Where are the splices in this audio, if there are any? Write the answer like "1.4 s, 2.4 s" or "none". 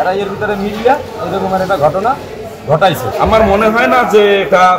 3.1 s